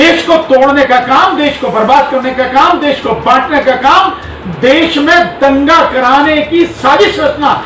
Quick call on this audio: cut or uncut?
uncut